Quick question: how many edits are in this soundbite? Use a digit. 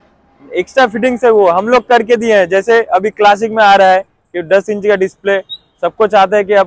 0